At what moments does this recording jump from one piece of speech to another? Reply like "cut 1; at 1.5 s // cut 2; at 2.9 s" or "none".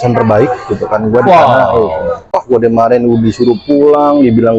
cut 1; at 2.4 s